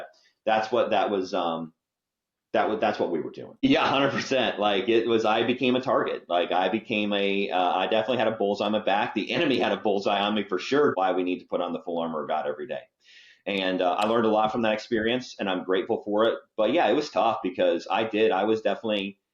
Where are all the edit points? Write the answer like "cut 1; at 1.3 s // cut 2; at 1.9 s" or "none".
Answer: cut 1; at 3.6 s // cut 2; at 10.9 s